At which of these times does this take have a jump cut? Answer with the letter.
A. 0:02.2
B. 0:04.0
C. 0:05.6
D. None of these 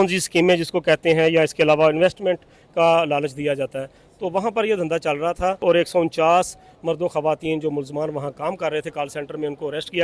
C